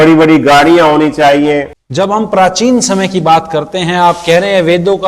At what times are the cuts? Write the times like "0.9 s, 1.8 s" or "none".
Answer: 1.8 s